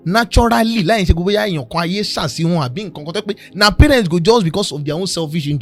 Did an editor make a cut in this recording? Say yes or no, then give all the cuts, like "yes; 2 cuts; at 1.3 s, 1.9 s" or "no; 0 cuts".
no; 0 cuts